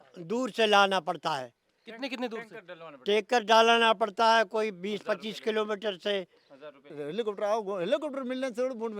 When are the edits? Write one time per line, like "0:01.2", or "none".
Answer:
0:07.0